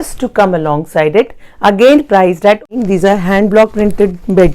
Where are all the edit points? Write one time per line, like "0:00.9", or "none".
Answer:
0:02.8